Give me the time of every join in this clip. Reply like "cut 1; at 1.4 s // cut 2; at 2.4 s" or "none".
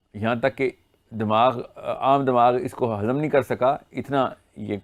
none

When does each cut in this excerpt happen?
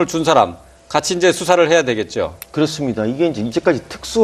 none

